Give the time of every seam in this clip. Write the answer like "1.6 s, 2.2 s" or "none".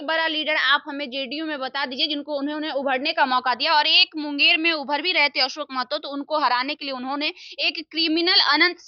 none